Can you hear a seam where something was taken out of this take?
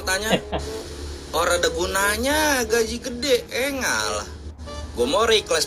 no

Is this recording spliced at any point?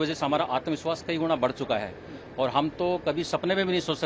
no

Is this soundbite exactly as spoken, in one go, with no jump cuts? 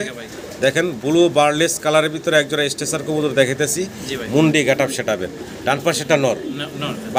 yes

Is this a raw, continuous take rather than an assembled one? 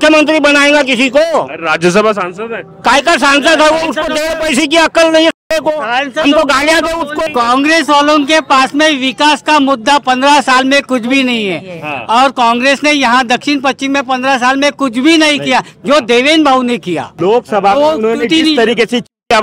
no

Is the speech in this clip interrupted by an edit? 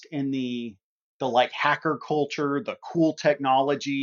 no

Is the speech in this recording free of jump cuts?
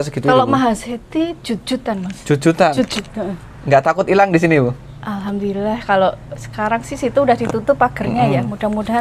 yes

